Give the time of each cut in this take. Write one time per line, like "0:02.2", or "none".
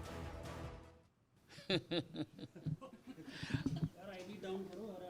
0:01.2